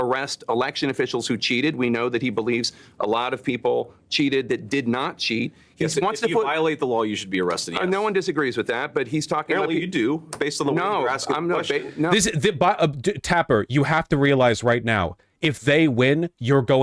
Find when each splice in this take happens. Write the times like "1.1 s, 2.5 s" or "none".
none